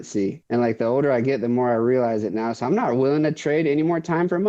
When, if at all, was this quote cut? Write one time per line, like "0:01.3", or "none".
none